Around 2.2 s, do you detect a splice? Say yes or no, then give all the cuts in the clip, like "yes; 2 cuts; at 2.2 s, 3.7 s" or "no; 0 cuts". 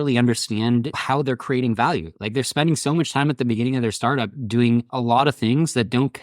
no; 2 cuts; at 1.0 s, 4.9 s